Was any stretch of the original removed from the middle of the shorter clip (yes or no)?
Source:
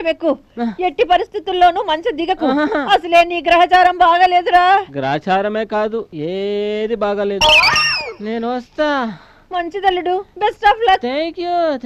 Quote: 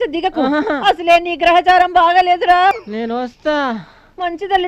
yes